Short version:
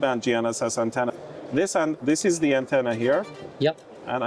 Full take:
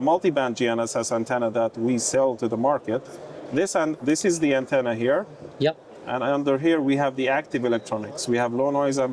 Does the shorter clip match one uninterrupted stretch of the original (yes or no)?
no